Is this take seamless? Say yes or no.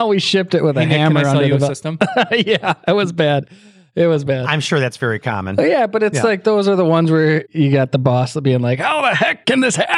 yes